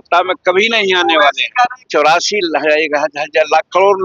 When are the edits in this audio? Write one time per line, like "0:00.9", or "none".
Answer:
0:01.8

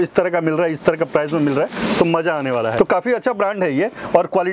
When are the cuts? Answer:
0:02.7

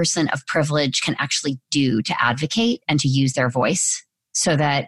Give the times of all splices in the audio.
none

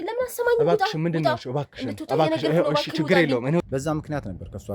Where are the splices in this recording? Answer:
0:03.6

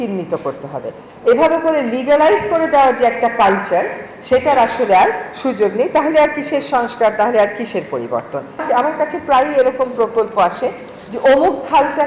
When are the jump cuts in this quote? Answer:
0:08.6

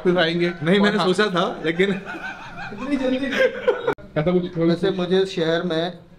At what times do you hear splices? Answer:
0:04.0

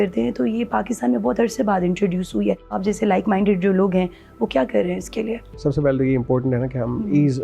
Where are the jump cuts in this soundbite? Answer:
0:02.8
0:05.4

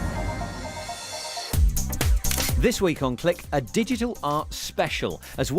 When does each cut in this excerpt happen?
0:01.0

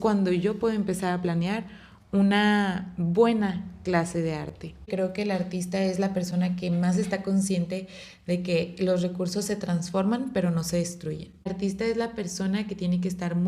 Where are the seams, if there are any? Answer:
0:04.9
0:11.5

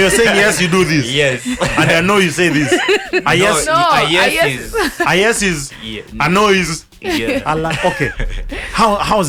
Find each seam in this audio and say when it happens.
none

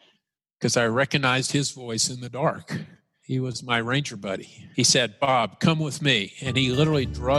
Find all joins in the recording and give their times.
0:03.2
0:04.7

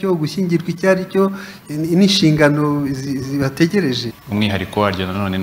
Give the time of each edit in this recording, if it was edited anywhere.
0:04.1

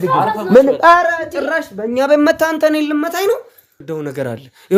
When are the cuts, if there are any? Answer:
0:03.8

